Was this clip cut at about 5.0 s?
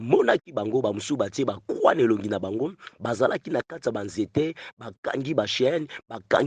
no; 0 cuts

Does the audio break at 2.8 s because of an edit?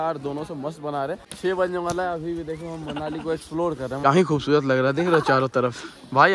no; 2 cuts; at 1.3 s, 4.0 s

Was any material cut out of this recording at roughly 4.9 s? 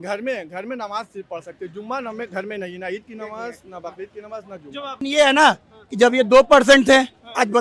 yes; 1 cut; at 4.9 s

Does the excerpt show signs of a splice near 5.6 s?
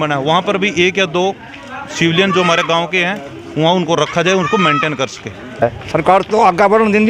yes; 1 cut; at 5.6 s

